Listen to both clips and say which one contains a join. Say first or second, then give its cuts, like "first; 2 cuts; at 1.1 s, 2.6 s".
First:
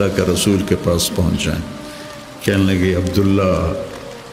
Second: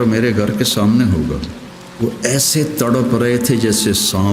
second; 1 cut; at 1.8 s